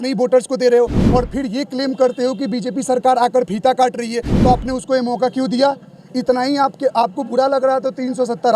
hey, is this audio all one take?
no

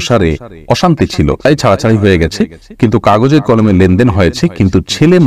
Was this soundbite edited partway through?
yes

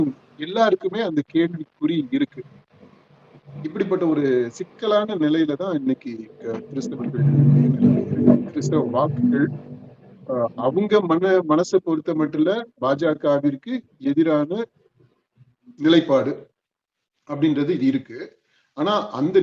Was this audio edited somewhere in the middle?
no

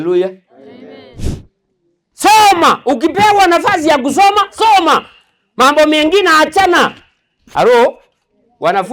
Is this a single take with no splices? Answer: no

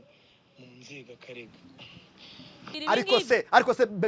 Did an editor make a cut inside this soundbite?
yes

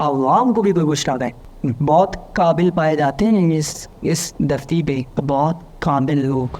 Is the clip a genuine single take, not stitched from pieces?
no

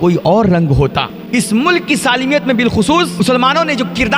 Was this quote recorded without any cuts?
no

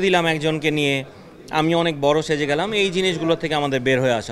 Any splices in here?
no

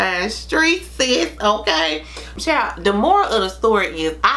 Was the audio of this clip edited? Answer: yes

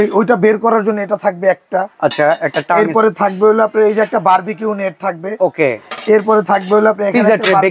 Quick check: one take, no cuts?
yes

